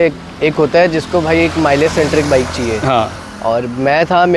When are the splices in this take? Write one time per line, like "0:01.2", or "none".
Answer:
none